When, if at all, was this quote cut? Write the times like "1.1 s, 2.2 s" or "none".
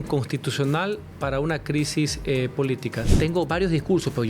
1.1 s, 3.0 s